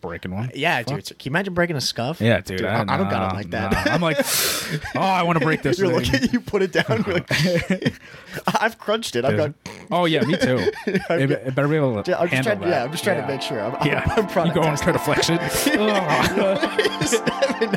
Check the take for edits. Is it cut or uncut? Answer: uncut